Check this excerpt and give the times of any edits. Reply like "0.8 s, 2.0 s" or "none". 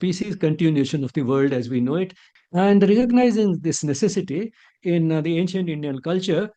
2.3 s